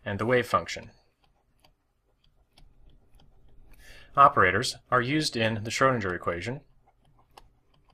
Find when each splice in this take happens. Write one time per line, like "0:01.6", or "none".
0:05.7